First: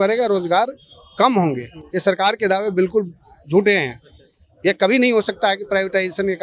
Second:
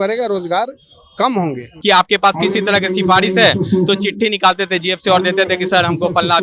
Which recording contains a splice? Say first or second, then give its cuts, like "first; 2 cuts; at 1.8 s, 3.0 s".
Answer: second; 1 cut; at 1.7 s